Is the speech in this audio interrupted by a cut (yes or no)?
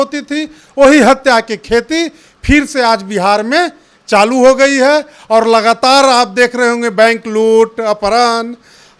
no